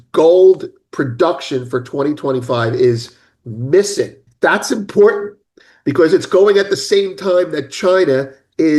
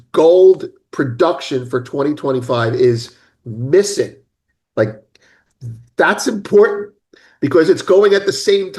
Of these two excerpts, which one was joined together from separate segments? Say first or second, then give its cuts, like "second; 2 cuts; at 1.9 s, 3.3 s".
first; 1 cut; at 4.2 s